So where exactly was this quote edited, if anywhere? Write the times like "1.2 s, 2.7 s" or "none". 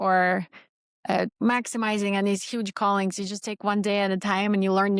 1.3 s